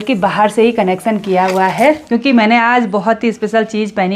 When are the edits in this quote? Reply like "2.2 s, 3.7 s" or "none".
2.0 s